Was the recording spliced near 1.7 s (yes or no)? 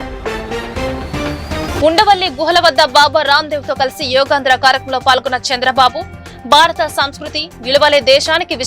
yes